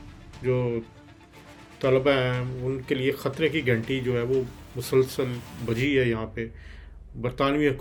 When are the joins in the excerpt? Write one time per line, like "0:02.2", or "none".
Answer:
none